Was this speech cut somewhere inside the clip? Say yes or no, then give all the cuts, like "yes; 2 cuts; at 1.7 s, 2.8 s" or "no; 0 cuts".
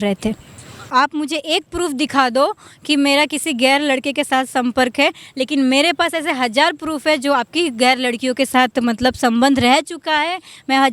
no; 0 cuts